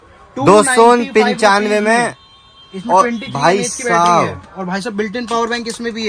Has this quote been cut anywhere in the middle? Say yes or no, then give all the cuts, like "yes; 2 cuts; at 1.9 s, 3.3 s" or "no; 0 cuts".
no; 0 cuts